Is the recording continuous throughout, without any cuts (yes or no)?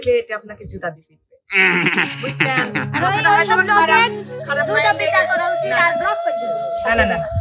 yes